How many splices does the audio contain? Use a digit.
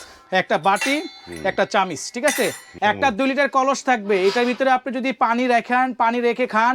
1